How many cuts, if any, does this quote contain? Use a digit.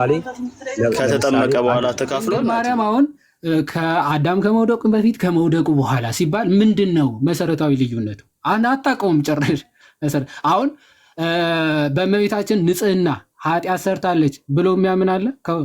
1